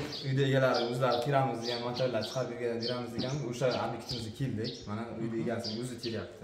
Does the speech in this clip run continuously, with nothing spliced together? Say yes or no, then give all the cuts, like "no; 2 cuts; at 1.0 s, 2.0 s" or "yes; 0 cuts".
yes; 0 cuts